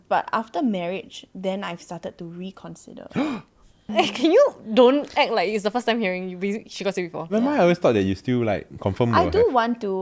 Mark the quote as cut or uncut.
cut